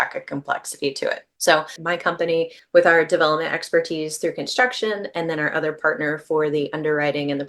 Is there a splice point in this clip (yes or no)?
yes